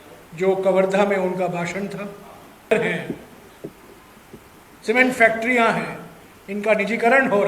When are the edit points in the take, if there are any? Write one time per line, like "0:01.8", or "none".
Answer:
0:02.7